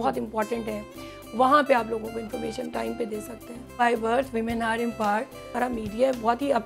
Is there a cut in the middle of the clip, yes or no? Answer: yes